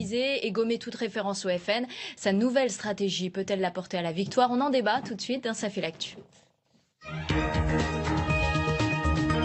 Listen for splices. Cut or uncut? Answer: uncut